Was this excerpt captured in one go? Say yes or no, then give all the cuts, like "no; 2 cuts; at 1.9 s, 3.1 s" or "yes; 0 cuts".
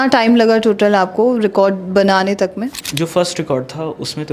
no; 1 cut; at 2.8 s